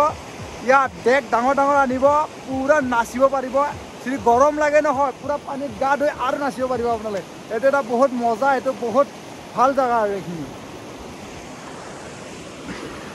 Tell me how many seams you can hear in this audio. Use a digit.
0